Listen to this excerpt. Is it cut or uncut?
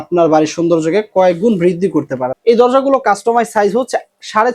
cut